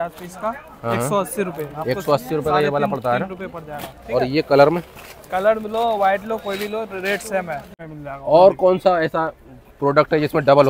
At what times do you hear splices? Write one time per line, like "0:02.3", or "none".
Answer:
0:07.7